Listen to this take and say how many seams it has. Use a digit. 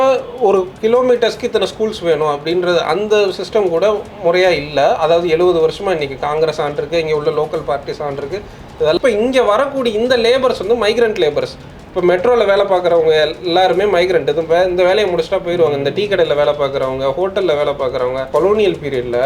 2